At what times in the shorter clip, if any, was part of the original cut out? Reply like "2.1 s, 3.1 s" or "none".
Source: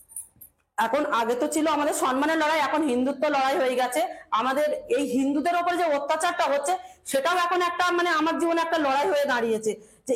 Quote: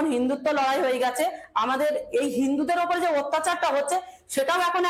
none